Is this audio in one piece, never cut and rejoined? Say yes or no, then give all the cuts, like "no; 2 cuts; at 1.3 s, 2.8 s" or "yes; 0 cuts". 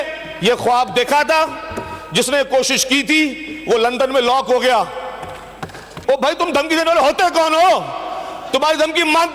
no; 1 cut; at 5.9 s